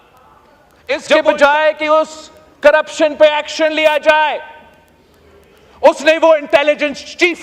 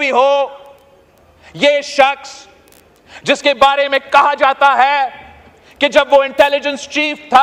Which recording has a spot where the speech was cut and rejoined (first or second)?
first